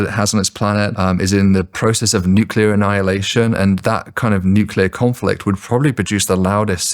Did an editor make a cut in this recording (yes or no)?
yes